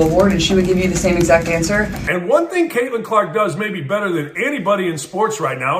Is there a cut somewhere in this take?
yes; 1 cut; at 2.0 s

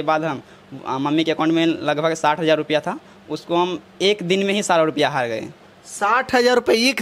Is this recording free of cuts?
yes; 0 cuts

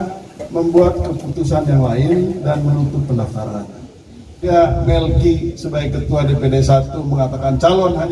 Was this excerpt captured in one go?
no; 1 cut; at 4.4 s

